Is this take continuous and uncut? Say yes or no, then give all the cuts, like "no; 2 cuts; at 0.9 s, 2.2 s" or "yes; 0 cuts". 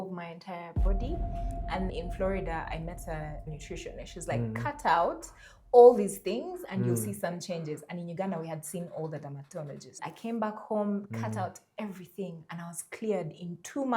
yes; 0 cuts